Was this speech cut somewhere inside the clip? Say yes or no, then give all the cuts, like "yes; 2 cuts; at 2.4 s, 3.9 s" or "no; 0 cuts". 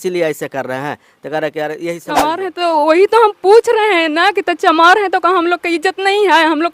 yes; 1 cut; at 2.2 s